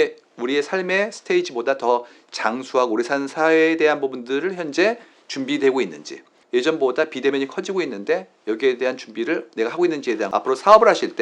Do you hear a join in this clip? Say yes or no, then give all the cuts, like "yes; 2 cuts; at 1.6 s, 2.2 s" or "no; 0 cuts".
yes; 2 cuts; at 6.4 s, 10.3 s